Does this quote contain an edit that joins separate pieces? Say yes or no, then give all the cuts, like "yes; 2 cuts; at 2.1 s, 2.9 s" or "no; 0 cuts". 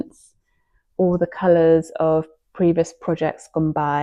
no; 0 cuts